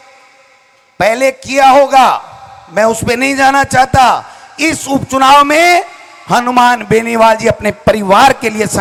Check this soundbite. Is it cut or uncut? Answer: uncut